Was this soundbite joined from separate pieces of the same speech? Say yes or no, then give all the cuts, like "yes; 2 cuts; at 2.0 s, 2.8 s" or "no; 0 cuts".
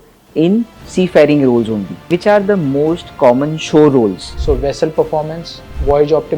yes; 2 cuts; at 1.9 s, 4.3 s